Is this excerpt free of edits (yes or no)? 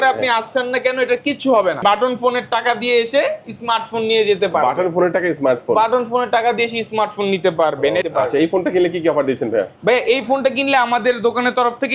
no